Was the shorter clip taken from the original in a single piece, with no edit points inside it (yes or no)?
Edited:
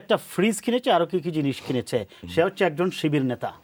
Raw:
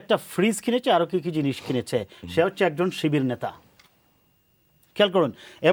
yes